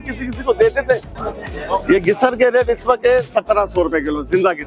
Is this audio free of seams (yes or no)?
no